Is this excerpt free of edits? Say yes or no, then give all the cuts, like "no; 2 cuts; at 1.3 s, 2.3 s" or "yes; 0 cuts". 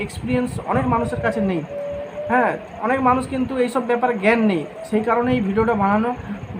yes; 0 cuts